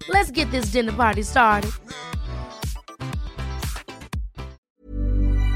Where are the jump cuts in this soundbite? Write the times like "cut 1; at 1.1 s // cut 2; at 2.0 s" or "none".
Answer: cut 1; at 4.6 s